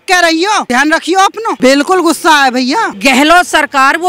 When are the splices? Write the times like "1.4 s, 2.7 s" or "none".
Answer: 1.0 s, 2.9 s

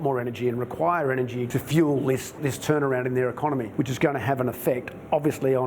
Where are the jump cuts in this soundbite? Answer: 3.7 s

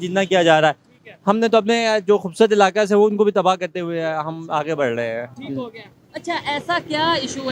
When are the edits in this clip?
none

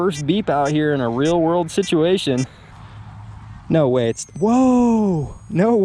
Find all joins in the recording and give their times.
2.6 s

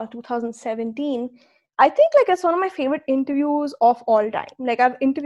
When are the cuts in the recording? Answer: none

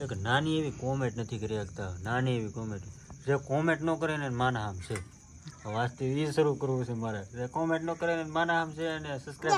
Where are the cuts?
none

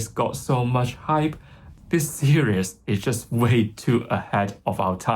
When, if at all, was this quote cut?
1.7 s

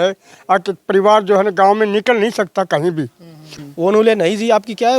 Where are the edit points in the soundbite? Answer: 3.5 s

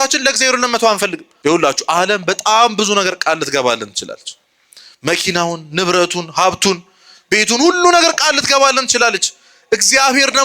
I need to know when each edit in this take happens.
1.2 s

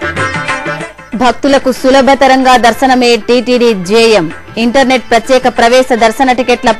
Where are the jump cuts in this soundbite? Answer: 0.9 s

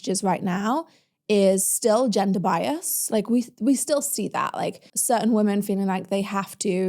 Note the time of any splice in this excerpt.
4.9 s

